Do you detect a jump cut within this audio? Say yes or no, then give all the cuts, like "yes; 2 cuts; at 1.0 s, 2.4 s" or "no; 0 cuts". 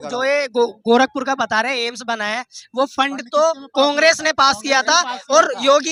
no; 0 cuts